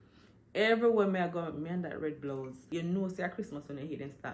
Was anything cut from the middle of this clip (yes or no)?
yes